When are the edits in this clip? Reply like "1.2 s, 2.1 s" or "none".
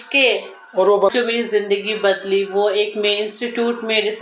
1.1 s